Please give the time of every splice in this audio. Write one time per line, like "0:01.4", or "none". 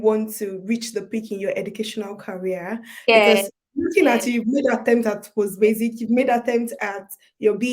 none